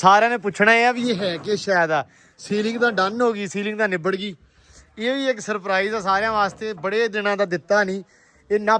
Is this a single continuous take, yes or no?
yes